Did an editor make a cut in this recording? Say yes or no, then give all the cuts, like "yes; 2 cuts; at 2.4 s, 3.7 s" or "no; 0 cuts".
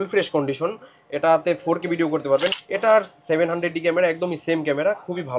yes; 1 cut; at 2.6 s